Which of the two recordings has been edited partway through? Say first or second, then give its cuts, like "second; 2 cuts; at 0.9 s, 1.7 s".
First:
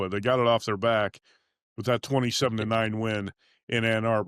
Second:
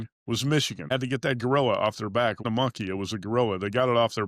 second; 2 cuts; at 0.9 s, 2.4 s